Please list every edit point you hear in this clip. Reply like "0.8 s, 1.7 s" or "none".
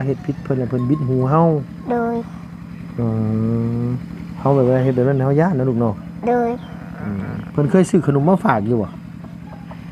none